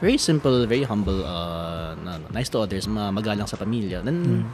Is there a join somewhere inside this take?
yes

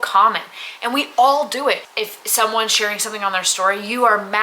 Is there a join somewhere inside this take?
yes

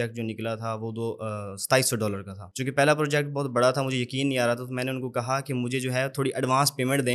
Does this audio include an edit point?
no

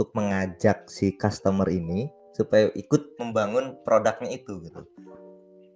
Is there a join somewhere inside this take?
no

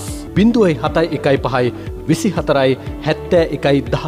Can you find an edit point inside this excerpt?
no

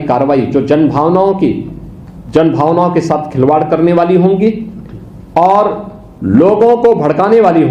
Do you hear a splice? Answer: no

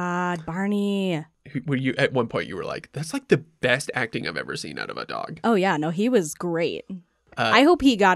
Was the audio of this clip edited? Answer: yes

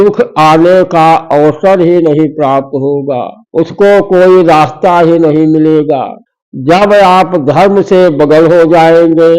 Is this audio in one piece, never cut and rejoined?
no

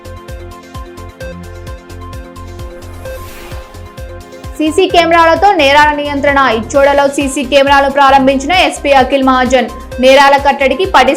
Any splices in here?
no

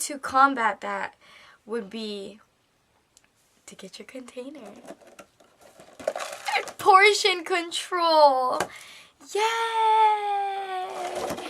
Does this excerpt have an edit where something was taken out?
no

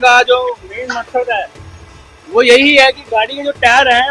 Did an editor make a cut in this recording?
no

